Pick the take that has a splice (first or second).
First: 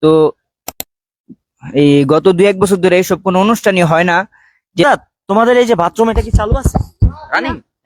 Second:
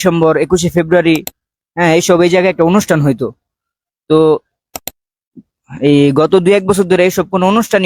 first